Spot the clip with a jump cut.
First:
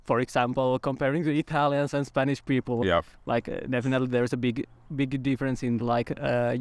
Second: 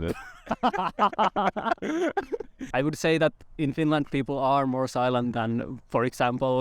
second; 1 cut; at 2.6 s

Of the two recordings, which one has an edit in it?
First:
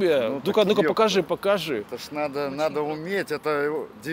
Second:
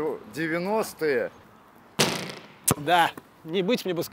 second; 1 cut; at 1.4 s

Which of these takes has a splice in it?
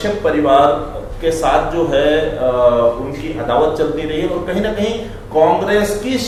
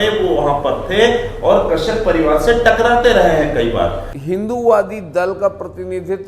second; 1 cut; at 4.1 s

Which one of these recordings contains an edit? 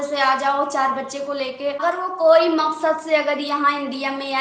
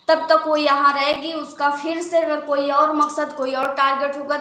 first; 1 cut; at 1.8 s

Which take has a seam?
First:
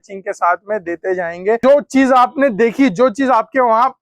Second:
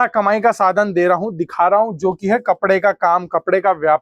first; 1 cut; at 1.6 s

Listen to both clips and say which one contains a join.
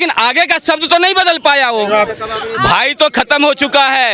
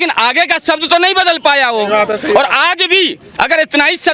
first; 1 cut; at 2.1 s

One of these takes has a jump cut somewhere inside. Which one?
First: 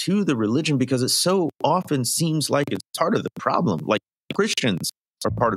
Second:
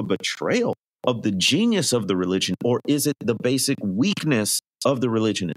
second; 2 cuts; at 0.9 s, 4.6 s

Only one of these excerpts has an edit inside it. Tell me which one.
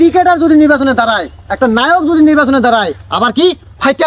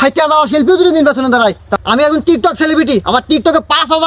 second; 1 cut; at 1.7 s

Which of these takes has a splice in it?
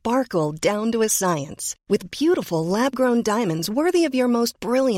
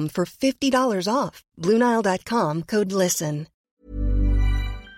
second; 1 cut; at 3.5 s

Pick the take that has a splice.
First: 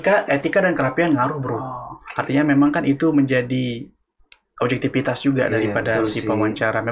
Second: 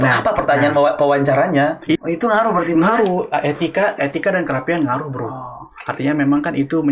second; 1 cut; at 2.0 s

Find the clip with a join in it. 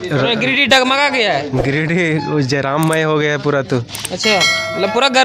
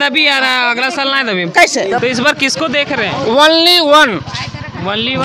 second; 1 cut; at 2.0 s

